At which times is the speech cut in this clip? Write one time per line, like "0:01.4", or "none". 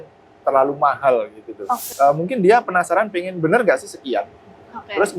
0:01.9